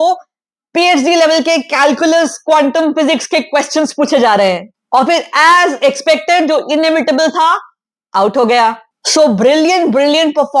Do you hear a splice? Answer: no; 0 cuts

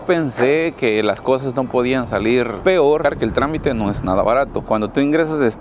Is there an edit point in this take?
yes; 2 cuts; at 3.0 s, 4.6 s

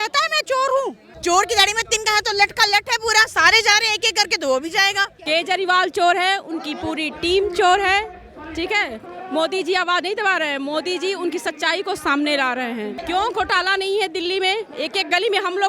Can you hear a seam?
yes; 3 cuts; at 1.1 s, 5.2 s, 13.0 s

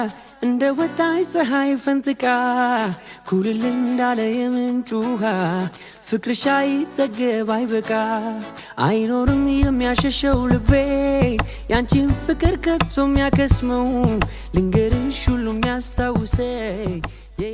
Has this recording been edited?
no; 0 cuts

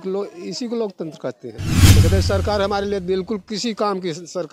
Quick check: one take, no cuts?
no; 1 cut; at 2.0 s

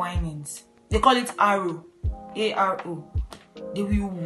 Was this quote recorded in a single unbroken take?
yes; 0 cuts

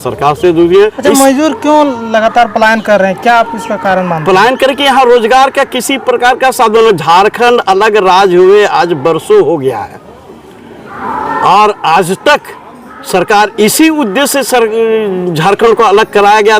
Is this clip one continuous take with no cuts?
no; 1 cut; at 1.0 s

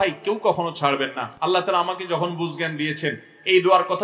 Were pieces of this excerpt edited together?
yes; 1 cut; at 1.2 s

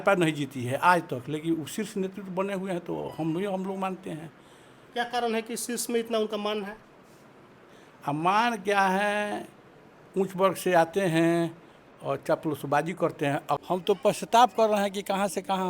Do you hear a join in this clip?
yes; 1 cut; at 13.6 s

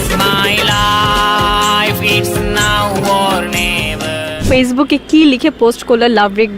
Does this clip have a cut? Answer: yes; 1 cut; at 4.4 s

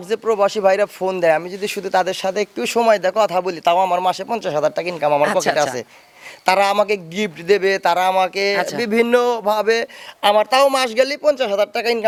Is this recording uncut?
yes; 0 cuts

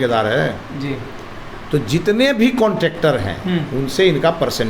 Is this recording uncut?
yes; 0 cuts

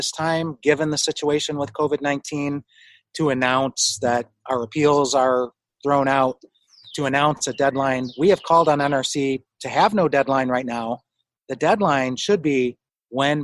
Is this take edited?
no; 0 cuts

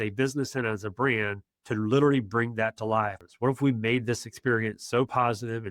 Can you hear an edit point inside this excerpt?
yes; 1 cut; at 3.2 s

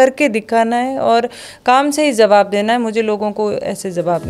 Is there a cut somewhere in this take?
no; 0 cuts

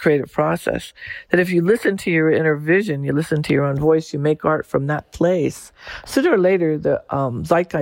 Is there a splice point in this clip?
no; 0 cuts

